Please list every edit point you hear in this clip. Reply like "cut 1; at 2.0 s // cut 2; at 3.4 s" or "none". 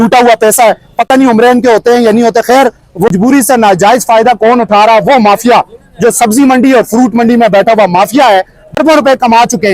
cut 1; at 3.1 s // cut 2; at 8.6 s